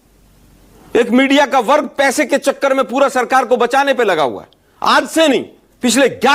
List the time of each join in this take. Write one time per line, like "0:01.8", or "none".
none